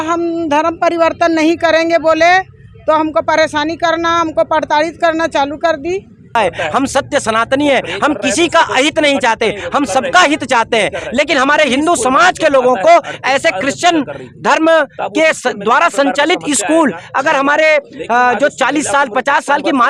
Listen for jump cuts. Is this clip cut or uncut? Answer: cut